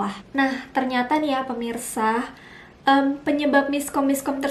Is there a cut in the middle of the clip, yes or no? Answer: no